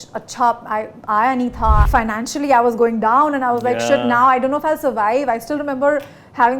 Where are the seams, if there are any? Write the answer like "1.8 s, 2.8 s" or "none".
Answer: 1.9 s